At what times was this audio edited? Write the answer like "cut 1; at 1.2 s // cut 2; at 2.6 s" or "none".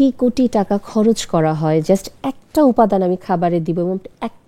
none